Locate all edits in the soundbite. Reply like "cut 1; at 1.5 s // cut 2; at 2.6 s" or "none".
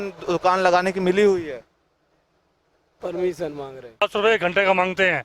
cut 1; at 4.0 s